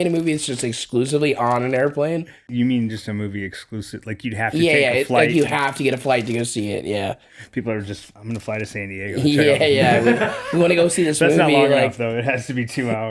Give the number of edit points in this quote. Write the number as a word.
one